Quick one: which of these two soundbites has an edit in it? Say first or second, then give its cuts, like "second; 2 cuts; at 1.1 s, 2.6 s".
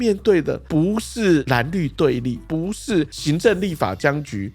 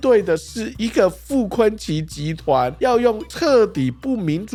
first; 1 cut; at 1.4 s